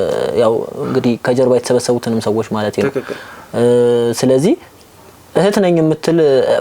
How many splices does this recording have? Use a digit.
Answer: 0